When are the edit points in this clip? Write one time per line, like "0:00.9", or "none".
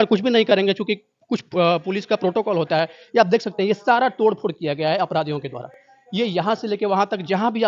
none